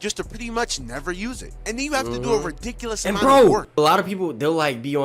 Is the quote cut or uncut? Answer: cut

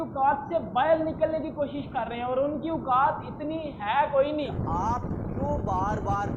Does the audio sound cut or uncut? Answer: cut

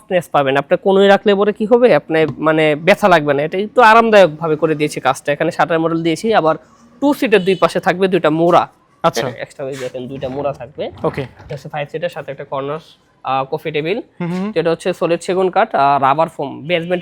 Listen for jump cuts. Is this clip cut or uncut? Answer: uncut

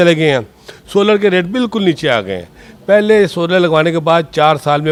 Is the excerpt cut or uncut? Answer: uncut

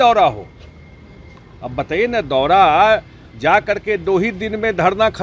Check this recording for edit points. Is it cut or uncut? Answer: uncut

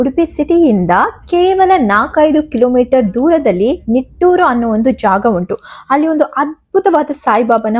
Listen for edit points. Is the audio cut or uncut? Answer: uncut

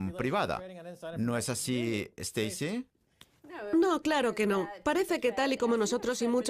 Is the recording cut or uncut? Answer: cut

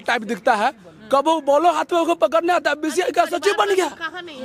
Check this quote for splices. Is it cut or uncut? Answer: uncut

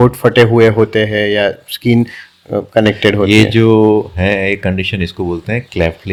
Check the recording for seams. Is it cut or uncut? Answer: uncut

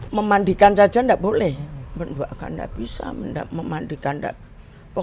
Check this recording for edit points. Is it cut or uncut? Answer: cut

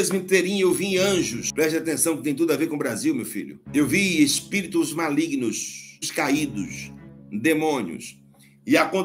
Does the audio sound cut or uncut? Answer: cut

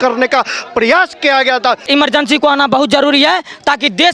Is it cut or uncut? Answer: cut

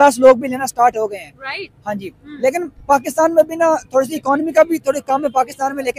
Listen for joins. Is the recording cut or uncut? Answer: uncut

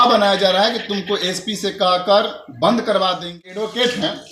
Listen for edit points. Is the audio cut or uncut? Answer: cut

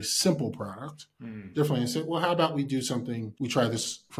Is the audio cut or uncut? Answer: cut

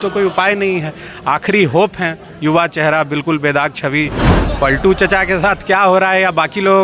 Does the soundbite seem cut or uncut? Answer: cut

